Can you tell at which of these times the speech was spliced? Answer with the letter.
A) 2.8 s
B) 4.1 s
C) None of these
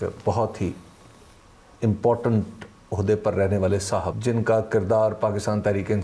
B